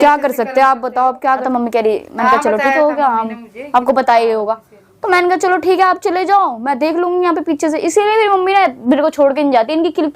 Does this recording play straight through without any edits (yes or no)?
no